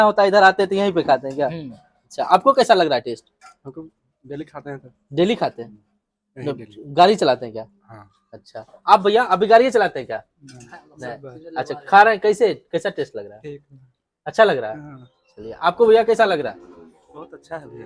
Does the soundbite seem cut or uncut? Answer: uncut